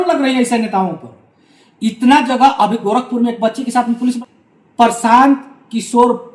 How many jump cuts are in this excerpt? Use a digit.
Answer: 1